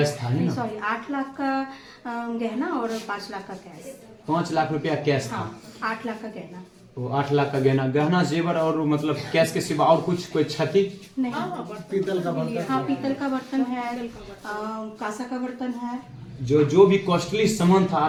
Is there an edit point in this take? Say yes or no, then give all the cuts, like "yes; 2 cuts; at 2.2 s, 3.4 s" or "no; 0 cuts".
no; 0 cuts